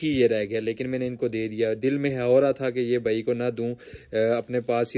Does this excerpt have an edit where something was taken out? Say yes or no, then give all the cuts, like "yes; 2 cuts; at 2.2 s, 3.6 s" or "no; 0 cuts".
no; 0 cuts